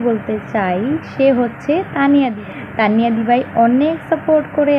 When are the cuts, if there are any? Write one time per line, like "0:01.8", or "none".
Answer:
0:02.4